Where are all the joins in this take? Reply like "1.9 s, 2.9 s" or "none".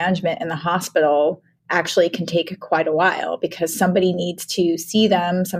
none